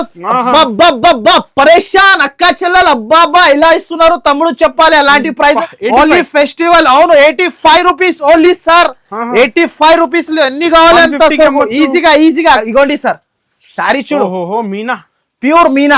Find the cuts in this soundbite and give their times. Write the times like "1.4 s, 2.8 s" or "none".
5.6 s, 12.6 s